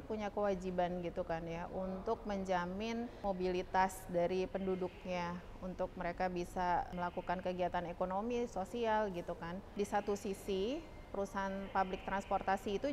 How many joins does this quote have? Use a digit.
4